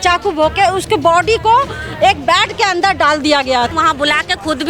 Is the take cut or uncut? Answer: cut